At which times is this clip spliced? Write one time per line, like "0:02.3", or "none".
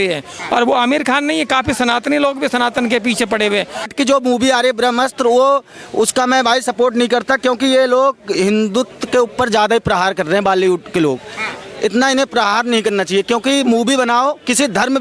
0:03.9